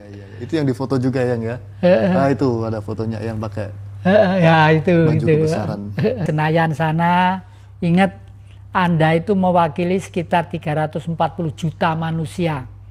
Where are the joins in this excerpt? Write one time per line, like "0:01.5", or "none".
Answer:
0:06.2